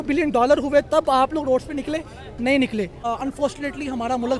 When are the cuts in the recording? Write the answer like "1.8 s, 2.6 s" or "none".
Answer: 3.0 s